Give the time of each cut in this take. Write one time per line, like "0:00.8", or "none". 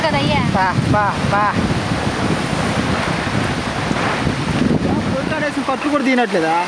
0:05.2